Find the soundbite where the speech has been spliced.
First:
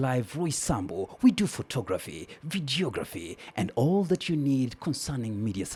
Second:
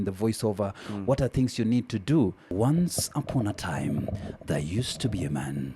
second; 1 cut; at 2.5 s

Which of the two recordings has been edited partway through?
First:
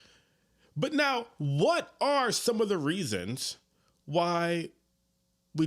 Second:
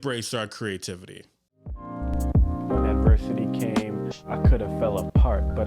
second; 1 cut; at 1.9 s

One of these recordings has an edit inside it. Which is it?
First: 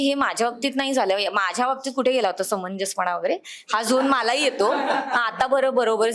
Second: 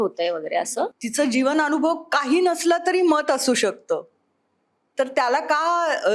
second; 1 cut; at 1.0 s

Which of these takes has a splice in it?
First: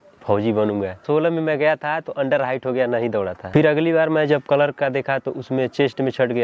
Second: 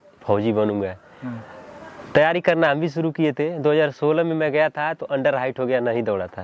first; 2 cuts; at 1.0 s, 3.4 s

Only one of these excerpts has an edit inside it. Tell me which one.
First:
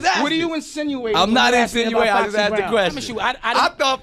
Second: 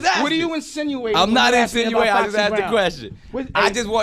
first; 1 cut; at 3.1 s

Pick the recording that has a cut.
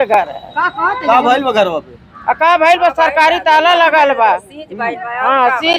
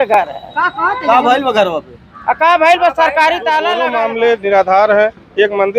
second; 1 cut; at 3.9 s

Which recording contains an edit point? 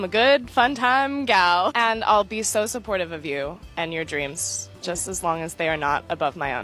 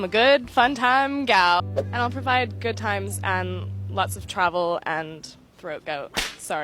second; 1 cut; at 1.6 s

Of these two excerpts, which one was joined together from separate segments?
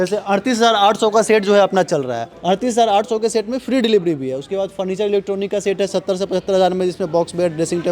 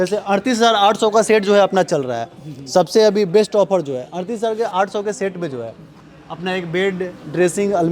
first; 1 cut; at 2.3 s

